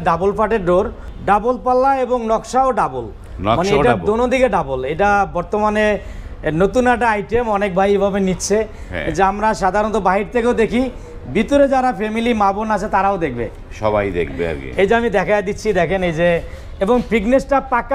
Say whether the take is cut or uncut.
cut